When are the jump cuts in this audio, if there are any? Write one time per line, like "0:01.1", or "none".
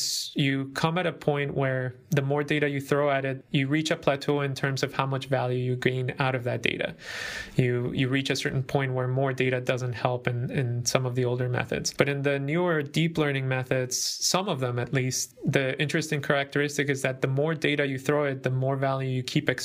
0:03.4
0:11.9
0:15.2